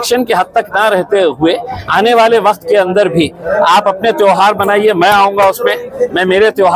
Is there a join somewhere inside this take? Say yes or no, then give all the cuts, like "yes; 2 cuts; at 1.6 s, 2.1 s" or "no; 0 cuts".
no; 0 cuts